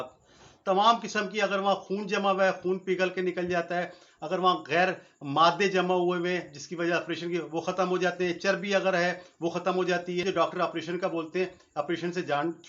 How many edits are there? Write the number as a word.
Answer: one